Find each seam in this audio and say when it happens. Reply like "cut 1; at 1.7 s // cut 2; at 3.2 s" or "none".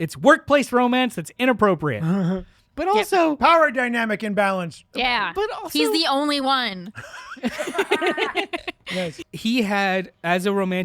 cut 1; at 9.2 s